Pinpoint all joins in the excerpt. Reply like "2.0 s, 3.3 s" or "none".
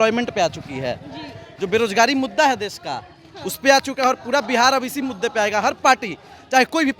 none